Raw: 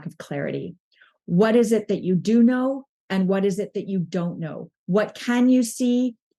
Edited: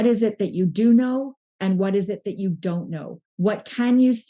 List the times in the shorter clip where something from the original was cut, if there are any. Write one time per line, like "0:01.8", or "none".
none